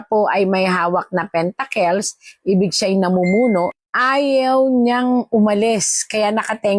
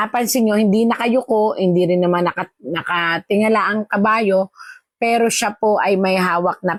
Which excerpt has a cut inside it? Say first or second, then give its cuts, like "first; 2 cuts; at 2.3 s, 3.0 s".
first; 1 cut; at 3.8 s